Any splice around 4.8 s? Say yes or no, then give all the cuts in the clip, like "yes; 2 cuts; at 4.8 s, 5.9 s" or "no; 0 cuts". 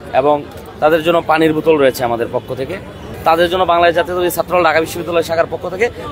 no; 1 cut; at 3.1 s